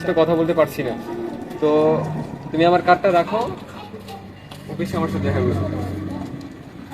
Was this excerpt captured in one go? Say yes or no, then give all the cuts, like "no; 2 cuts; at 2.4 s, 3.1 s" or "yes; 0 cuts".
yes; 0 cuts